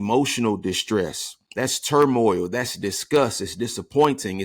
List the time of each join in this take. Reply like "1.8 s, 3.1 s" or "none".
none